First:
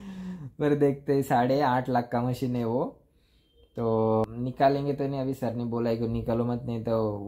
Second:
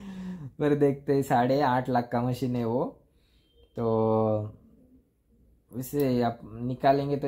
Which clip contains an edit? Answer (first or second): first